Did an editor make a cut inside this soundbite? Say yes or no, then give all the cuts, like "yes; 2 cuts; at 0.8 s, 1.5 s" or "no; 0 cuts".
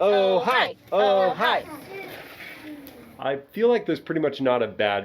yes; 2 cuts; at 1.7 s, 3.1 s